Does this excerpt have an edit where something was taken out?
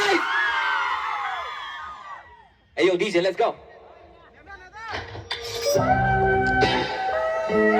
no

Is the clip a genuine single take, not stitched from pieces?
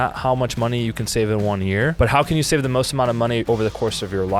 no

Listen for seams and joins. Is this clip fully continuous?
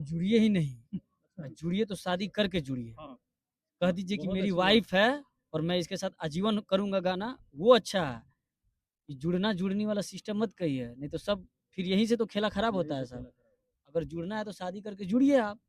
yes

